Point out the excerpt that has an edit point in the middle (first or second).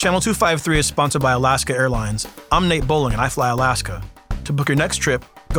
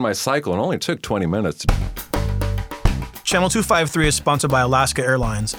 second